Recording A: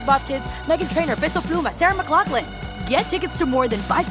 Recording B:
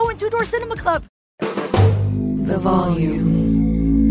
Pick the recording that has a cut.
B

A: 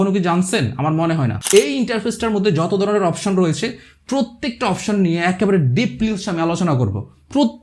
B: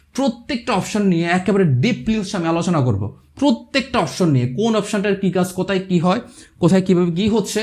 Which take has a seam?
A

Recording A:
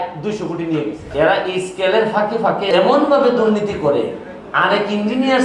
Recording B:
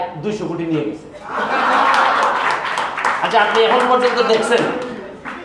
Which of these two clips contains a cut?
A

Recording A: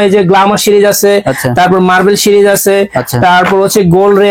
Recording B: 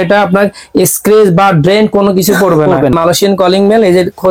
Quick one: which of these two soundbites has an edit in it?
B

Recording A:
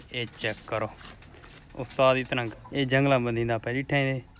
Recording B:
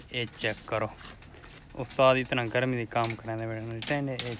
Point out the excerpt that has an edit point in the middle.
A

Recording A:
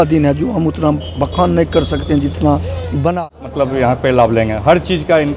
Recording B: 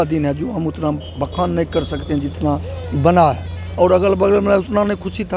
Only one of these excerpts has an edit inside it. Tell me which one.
A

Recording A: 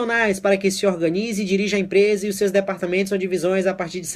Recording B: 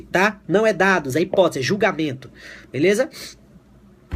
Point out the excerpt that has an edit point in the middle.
A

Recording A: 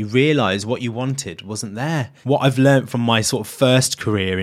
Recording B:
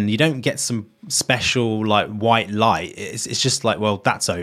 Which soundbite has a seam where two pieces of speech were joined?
A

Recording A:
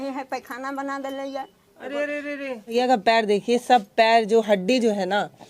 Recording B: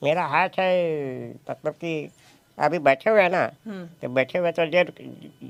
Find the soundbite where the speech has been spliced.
A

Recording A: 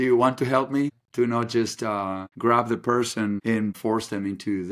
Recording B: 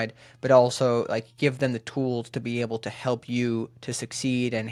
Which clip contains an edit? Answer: A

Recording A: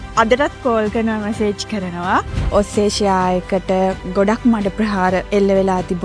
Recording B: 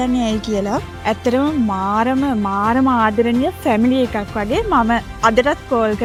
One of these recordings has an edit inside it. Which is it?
A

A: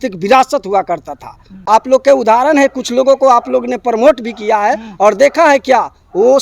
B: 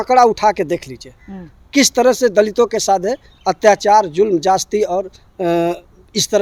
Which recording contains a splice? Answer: A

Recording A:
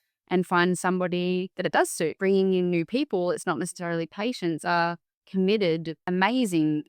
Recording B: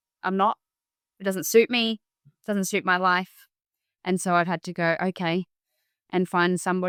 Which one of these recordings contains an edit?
A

